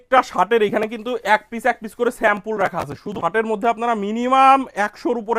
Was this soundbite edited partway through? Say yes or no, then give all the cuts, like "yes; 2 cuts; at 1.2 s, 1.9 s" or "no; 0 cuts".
yes; 1 cut; at 3.1 s